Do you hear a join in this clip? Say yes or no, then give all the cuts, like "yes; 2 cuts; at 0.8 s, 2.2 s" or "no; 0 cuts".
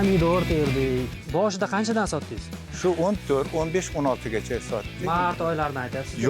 yes; 1 cut; at 1.2 s